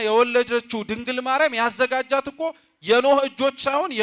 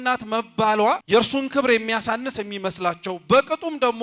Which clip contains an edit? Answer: second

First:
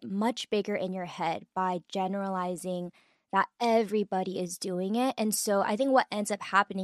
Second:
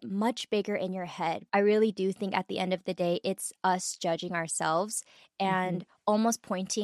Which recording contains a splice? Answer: second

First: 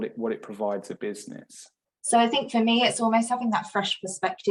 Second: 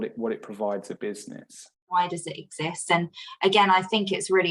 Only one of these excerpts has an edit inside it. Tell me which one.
second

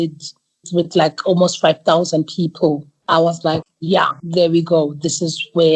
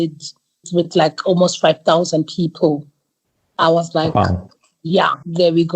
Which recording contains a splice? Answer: first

